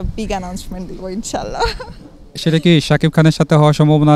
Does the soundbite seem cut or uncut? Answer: uncut